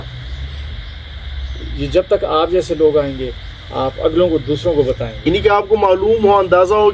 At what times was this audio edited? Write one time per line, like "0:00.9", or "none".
0:05.1